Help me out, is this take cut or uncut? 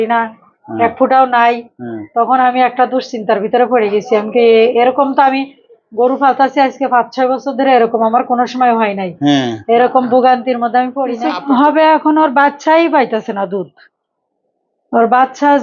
cut